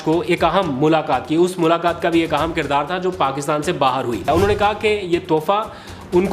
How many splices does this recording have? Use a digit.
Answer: 1